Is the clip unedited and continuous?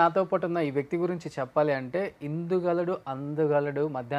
yes; 0 cuts

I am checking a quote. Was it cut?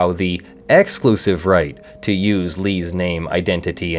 no; 0 cuts

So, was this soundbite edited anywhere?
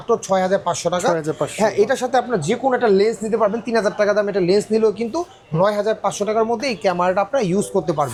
no; 0 cuts

